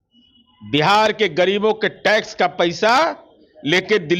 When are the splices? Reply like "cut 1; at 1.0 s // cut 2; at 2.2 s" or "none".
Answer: none